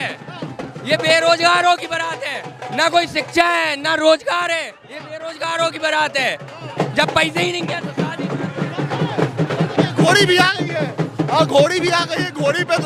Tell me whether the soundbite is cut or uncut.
uncut